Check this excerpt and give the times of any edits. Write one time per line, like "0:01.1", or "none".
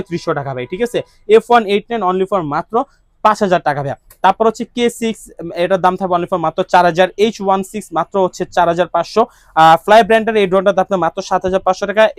none